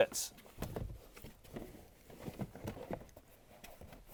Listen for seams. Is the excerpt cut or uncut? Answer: uncut